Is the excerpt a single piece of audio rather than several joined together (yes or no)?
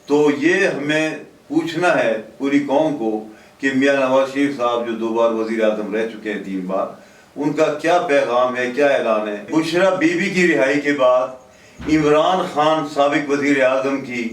no